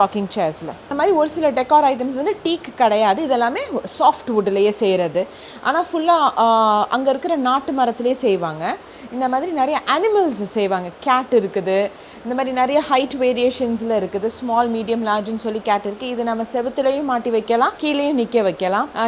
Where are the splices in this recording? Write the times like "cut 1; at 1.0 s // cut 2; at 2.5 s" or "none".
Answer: none